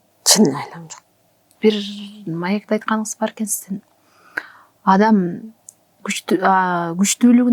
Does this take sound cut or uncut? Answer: cut